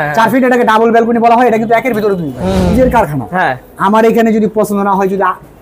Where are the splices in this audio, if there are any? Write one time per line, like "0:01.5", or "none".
0:02.7